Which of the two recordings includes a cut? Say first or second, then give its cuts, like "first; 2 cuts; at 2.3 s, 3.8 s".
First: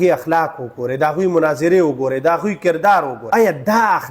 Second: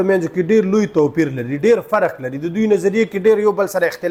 first; 1 cut; at 3.2 s